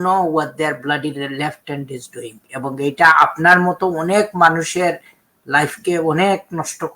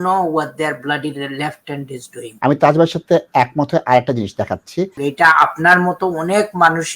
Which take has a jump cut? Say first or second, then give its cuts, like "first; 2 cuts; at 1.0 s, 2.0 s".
second; 2 cuts; at 2.2 s, 4.9 s